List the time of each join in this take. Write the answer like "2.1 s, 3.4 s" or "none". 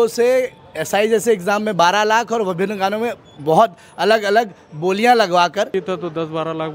5.7 s